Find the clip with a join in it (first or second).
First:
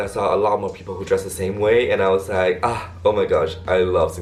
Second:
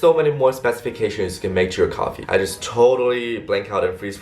second